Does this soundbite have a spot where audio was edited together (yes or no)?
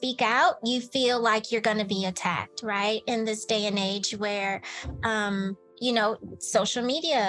no